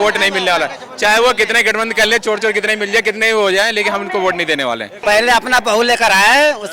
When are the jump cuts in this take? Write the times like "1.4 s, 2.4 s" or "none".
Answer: 4.9 s